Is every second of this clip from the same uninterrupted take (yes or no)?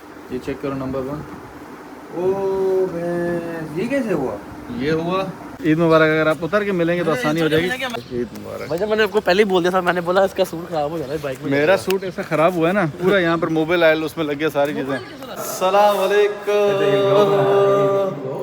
no